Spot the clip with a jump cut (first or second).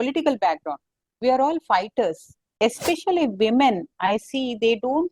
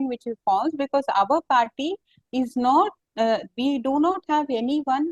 first